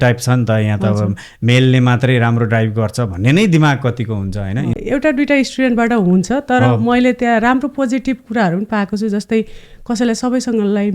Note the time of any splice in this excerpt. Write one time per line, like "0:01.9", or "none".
0:04.8